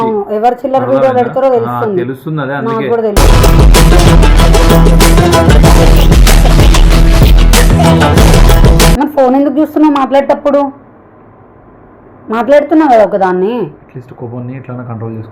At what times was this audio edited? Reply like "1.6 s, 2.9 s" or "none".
9.0 s